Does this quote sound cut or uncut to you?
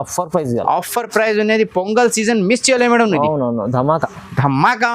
uncut